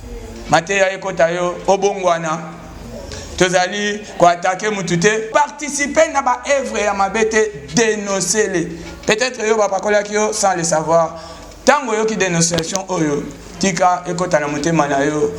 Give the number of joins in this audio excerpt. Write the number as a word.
one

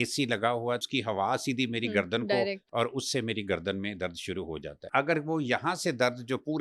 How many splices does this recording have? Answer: three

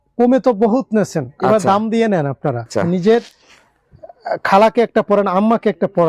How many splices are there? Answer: one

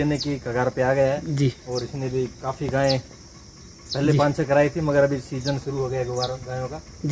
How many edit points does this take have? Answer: zero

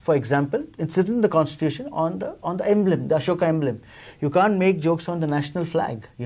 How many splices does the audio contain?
zero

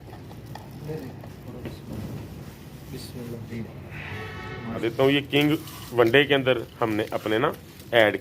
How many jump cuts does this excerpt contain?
one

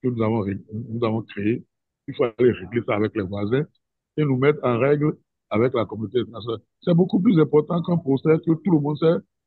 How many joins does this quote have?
zero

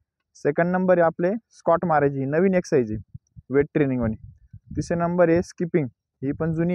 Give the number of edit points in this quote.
zero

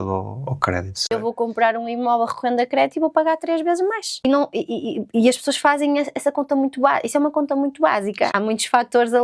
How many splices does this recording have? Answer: three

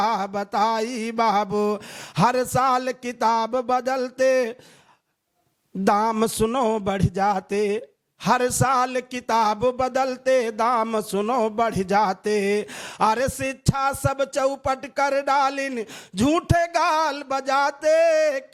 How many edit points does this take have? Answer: zero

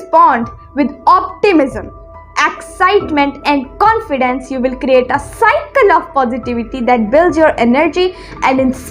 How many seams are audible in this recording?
zero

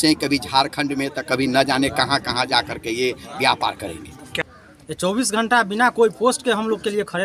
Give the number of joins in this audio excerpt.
one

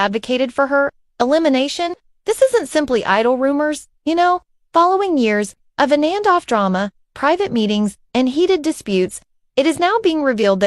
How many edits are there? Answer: one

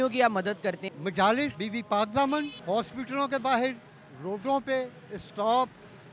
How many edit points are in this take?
three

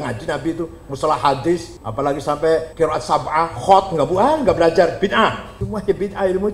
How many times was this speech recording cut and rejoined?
three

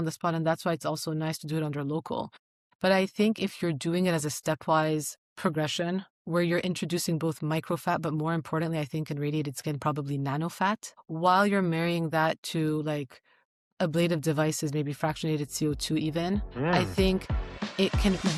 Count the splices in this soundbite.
zero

